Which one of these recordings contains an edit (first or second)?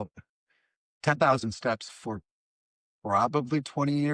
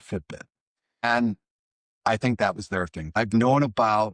second